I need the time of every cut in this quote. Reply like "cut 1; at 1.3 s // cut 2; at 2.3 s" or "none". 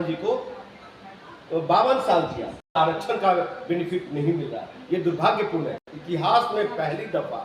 cut 1; at 2.8 s // cut 2; at 5.9 s